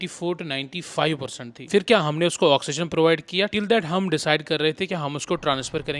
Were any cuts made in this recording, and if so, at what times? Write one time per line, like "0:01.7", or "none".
none